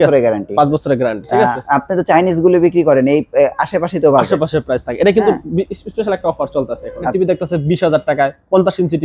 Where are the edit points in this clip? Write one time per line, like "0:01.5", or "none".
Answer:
0:07.1